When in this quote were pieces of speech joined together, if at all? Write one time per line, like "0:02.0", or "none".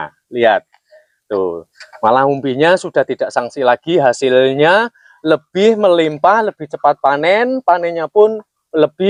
none